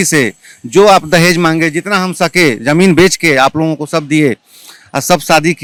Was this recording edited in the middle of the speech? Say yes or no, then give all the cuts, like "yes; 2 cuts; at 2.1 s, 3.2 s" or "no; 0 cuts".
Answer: no; 0 cuts